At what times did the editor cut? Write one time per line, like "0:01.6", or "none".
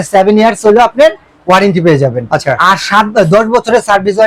none